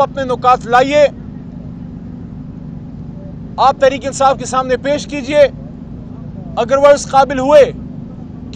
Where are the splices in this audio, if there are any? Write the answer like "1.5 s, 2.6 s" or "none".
none